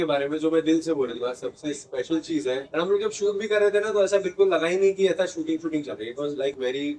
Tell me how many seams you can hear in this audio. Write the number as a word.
one